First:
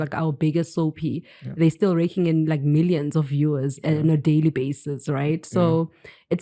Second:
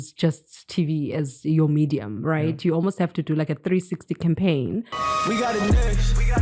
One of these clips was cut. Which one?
second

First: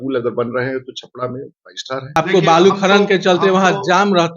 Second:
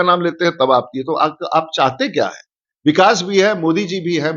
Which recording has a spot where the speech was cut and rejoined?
first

